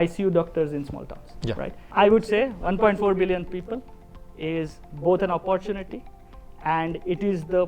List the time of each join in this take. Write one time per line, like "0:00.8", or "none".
0:01.8